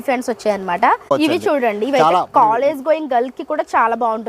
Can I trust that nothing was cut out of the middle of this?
no; 1 cut; at 1.0 s

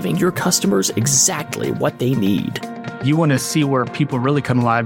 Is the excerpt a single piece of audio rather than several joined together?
yes; 0 cuts

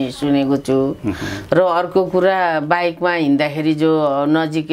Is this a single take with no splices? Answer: yes; 0 cuts

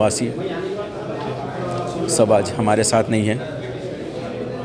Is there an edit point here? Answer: no; 0 cuts

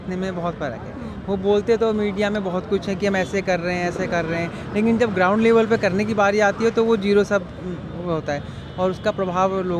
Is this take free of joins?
yes; 0 cuts

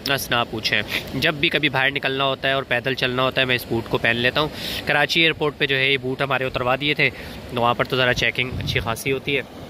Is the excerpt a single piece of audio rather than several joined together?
yes; 0 cuts

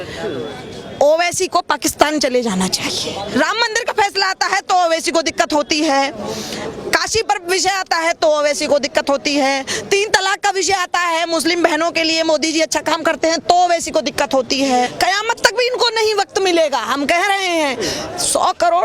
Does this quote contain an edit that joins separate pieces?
yes; 2 cuts; at 3.3 s, 14.9 s

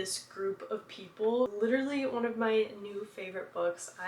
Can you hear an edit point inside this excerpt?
yes; 1 cut; at 1.5 s

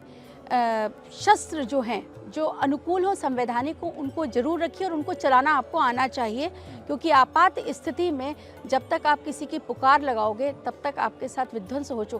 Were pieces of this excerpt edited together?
no; 0 cuts

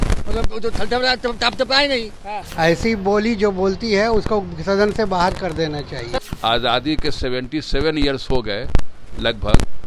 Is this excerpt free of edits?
no; 2 cuts; at 2.4 s, 6.2 s

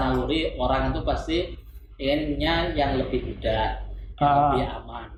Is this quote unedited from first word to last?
yes; 0 cuts

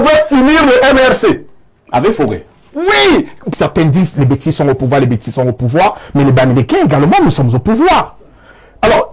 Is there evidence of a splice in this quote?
yes; 1 cut; at 3.5 s

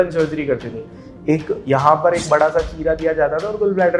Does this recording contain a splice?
no; 0 cuts

